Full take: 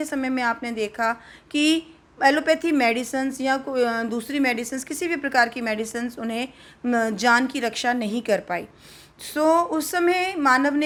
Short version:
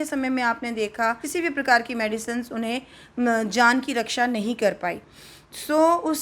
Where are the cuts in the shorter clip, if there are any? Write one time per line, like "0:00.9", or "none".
0:01.2